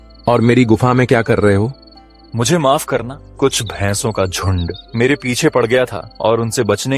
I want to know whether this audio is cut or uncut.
cut